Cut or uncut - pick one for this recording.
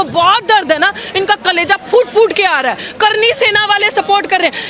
uncut